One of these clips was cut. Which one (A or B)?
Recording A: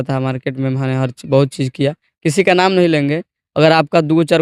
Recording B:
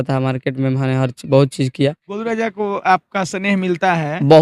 B